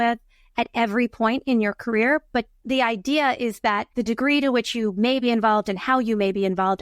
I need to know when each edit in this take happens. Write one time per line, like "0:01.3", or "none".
0:02.6
0:03.9